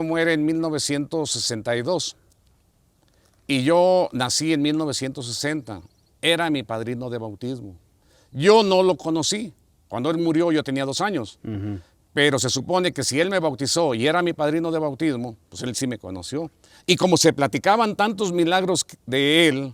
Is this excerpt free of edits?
yes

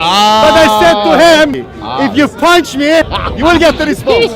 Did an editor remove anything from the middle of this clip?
yes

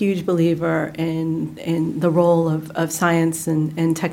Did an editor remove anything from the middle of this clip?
no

